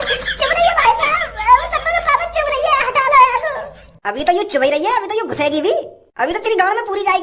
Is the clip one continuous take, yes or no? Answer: yes